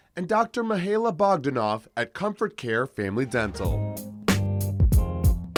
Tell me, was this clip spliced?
no; 0 cuts

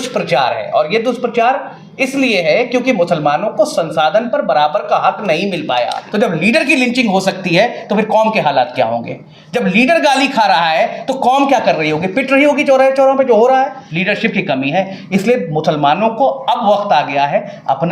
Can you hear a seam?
yes; 2 cuts; at 6.0 s, 13.9 s

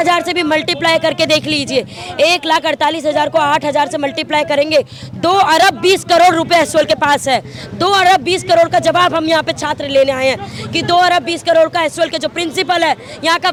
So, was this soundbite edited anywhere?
no; 0 cuts

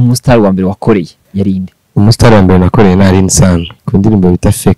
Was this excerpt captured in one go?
no; 2 cuts; at 1.2 s, 3.7 s

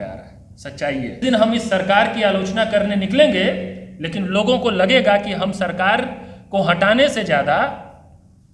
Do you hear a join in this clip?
yes; 1 cut; at 1.2 s

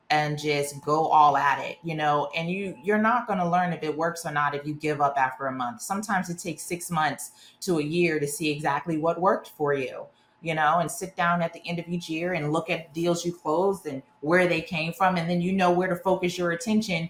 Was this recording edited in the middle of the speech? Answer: no; 0 cuts

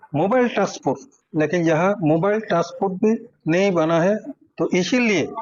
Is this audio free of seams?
yes; 0 cuts

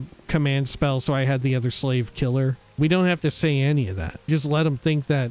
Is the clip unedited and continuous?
no; 2 cuts; at 2.8 s, 4.3 s

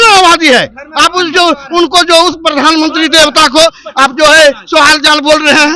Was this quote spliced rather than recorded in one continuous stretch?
no; 0 cuts

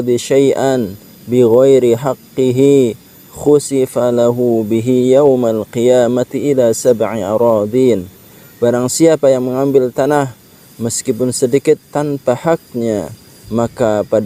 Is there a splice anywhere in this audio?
no; 0 cuts

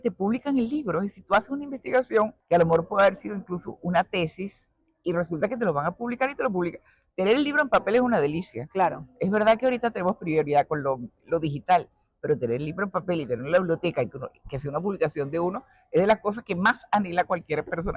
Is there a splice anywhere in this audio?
yes; 1 cut; at 2.4 s

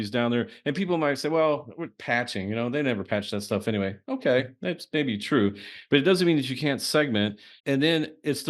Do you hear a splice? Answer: yes; 1 cut; at 7.5 s

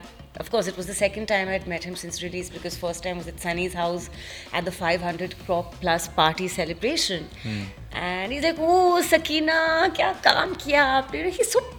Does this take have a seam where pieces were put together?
no; 0 cuts

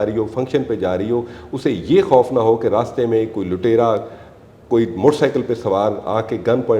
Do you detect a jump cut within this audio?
no; 0 cuts

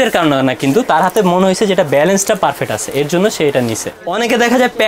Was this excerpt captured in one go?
no; 1 cut; at 4.0 s

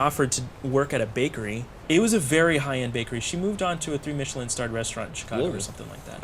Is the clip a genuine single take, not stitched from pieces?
no; 1 cut; at 1.7 s

